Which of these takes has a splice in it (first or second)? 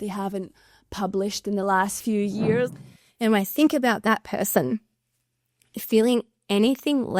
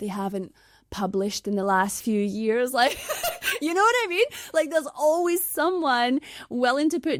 first